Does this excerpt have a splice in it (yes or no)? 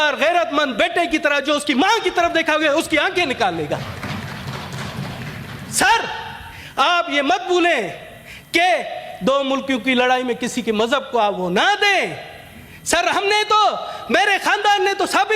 no